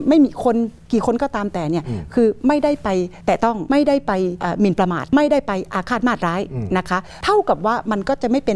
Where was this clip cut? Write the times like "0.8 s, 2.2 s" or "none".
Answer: 3.4 s, 4.7 s, 7.1 s